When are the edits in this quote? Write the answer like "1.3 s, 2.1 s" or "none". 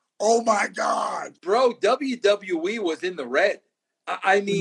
1.3 s